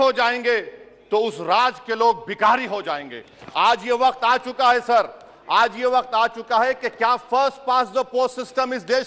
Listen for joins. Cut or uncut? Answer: uncut